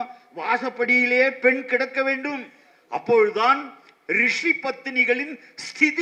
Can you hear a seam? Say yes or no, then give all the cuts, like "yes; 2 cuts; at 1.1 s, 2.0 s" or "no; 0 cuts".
no; 0 cuts